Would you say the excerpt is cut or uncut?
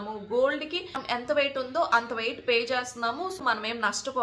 cut